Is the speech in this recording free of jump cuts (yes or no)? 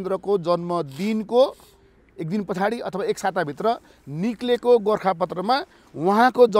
yes